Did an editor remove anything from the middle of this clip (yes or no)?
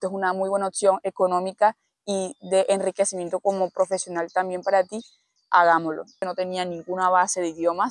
yes